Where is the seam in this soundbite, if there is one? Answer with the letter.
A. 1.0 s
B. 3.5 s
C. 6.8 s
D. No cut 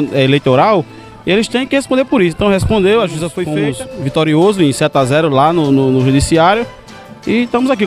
B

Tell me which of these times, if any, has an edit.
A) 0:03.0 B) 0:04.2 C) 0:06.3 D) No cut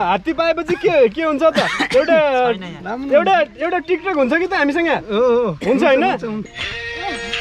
C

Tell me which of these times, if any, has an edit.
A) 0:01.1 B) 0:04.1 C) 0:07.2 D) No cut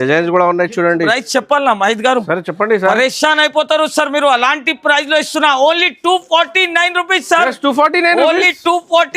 A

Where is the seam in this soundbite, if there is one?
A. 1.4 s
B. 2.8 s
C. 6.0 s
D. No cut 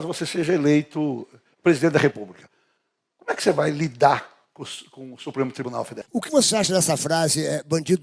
C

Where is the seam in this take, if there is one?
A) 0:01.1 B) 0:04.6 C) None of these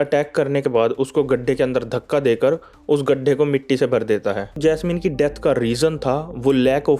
B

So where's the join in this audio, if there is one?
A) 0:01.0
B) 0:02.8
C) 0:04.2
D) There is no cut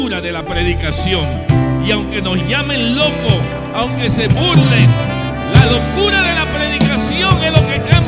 D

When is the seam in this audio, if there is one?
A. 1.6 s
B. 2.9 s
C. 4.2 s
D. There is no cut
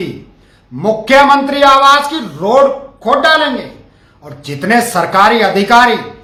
D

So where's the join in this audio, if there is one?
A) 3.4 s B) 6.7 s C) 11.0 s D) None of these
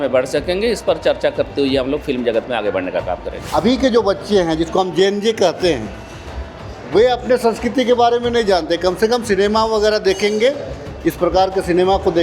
A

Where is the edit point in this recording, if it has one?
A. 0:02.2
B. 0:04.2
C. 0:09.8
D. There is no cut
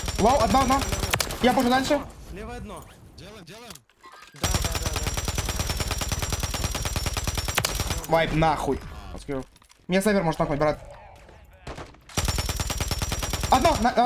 C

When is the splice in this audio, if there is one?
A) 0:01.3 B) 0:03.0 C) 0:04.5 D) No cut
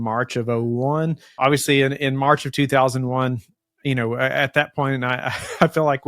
A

